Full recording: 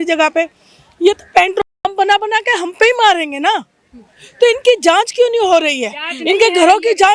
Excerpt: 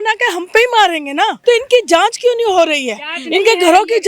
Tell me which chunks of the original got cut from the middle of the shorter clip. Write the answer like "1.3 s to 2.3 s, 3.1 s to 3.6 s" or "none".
3.6 s to 4.3 s